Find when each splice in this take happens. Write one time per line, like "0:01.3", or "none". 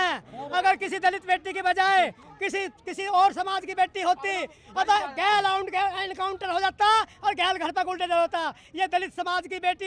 none